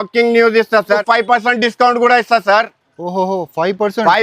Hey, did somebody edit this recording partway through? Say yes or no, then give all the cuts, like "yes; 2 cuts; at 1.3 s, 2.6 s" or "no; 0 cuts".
yes; 1 cut; at 1.0 s